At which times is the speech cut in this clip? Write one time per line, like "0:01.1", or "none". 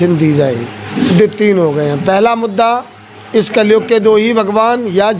0:01.0